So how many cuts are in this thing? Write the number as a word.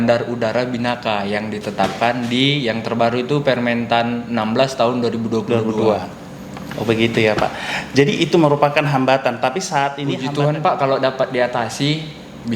one